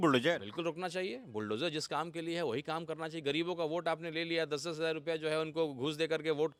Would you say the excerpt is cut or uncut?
uncut